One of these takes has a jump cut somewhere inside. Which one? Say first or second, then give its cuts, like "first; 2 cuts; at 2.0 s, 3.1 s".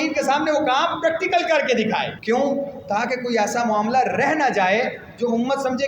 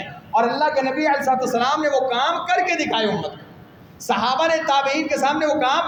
first; 1 cut; at 2.2 s